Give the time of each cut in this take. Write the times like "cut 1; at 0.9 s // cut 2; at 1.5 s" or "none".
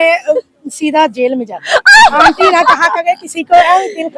none